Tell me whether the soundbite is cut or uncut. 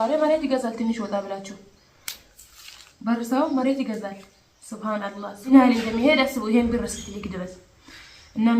cut